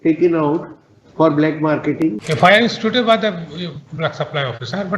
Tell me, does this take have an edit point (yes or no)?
yes